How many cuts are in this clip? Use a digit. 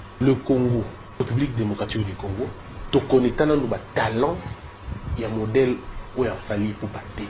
2